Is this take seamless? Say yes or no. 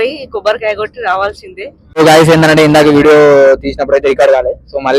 no